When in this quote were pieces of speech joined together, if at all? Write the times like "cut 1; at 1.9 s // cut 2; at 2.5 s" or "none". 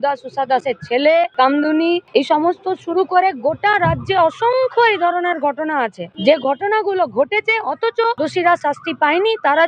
cut 1; at 1.7 s // cut 2; at 6.0 s // cut 3; at 8.2 s